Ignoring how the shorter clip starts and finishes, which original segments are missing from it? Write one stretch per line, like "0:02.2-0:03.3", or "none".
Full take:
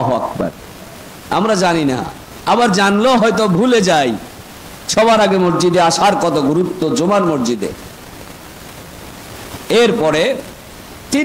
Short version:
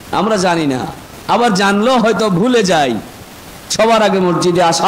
none